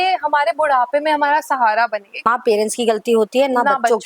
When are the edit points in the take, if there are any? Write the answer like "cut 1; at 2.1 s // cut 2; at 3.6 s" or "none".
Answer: cut 1; at 2.1 s